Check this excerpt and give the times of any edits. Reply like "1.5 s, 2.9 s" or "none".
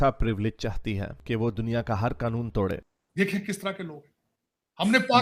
2.9 s